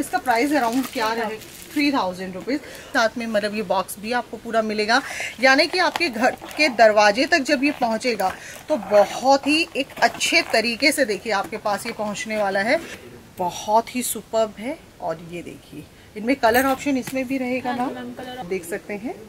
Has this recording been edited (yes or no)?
yes